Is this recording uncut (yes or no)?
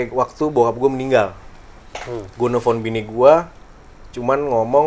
yes